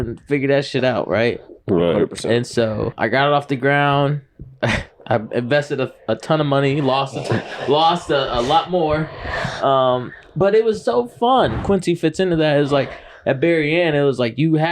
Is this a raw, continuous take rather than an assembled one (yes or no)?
no